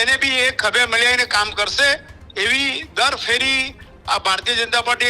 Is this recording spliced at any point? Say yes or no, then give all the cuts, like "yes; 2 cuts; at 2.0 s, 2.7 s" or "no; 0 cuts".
no; 0 cuts